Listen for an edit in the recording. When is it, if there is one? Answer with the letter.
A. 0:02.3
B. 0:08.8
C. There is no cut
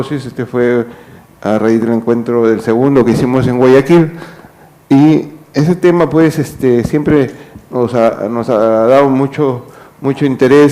B